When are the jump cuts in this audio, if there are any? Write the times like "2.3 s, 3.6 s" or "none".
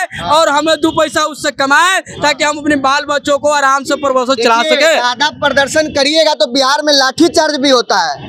none